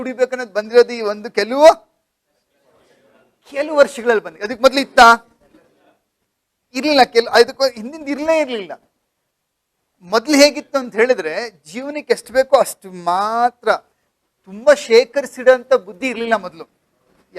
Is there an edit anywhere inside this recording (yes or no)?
no